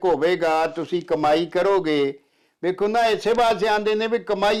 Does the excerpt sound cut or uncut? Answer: uncut